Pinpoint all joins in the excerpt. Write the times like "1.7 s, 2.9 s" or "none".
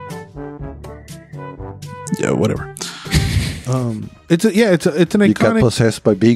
none

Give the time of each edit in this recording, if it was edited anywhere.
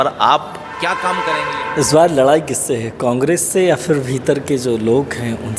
1.2 s

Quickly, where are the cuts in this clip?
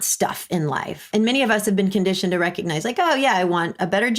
1.1 s

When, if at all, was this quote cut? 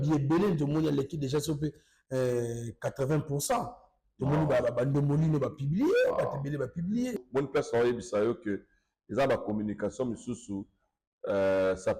7.2 s

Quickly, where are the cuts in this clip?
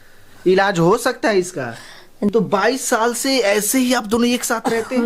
2.3 s

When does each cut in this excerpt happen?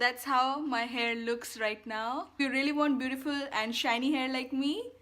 2.4 s

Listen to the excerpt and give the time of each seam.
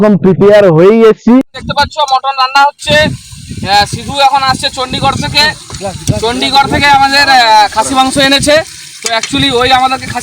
1.3 s

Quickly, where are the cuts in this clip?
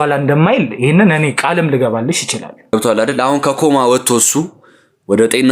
2.7 s

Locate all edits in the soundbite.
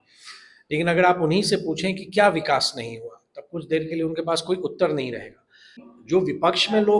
5.8 s

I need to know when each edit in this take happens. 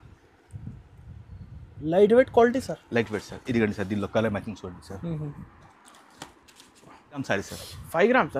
7.2 s

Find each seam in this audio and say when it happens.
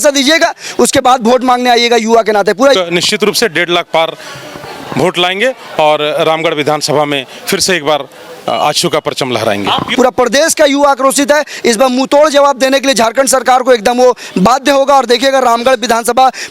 2.8 s, 9.9 s

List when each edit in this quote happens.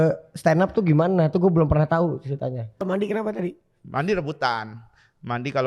2.8 s

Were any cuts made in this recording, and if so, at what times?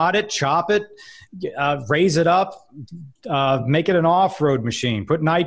none

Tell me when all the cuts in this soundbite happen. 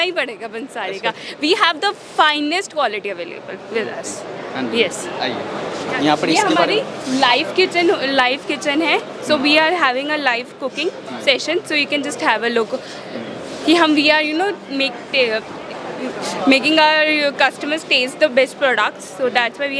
5.6 s

